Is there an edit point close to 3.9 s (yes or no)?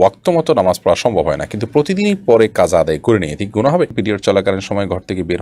yes